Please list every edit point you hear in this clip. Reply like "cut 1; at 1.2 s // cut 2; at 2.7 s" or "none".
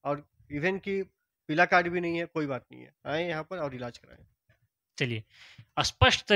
none